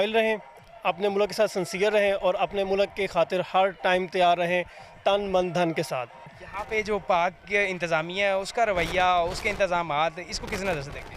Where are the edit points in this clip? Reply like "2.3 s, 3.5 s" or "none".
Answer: 6.2 s